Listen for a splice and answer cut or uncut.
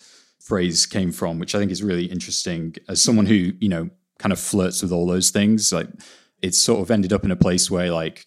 uncut